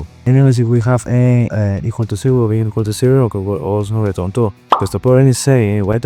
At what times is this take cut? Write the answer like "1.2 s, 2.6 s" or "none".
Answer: 1.5 s